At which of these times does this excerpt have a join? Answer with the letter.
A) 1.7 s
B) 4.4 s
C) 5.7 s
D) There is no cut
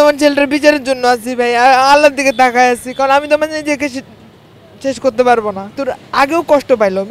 C